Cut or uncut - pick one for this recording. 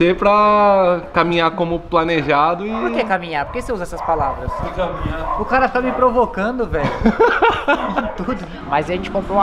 cut